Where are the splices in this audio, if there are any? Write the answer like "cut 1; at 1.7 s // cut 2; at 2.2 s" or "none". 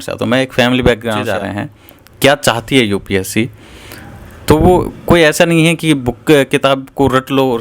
cut 1; at 1.3 s

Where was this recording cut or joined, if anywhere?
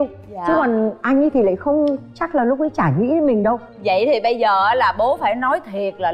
none

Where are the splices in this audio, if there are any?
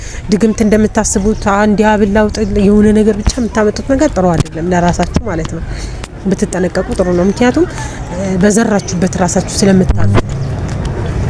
none

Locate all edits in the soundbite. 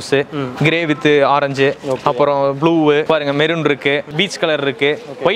cut 1; at 3.0 s // cut 2; at 4.1 s

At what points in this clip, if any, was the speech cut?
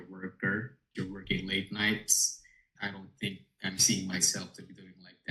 cut 1; at 0.9 s // cut 2; at 2.7 s

